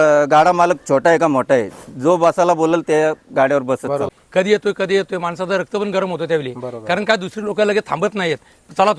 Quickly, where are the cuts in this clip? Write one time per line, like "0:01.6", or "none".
0:04.2